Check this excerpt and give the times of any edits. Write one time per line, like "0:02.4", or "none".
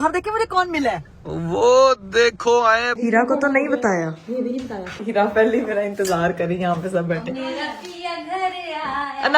0:02.9
0:05.0